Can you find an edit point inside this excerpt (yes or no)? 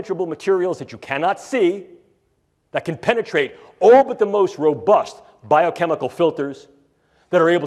no